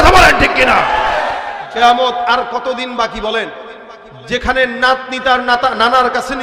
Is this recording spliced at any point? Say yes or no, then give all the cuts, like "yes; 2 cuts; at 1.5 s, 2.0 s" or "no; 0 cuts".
yes; 1 cut; at 1.6 s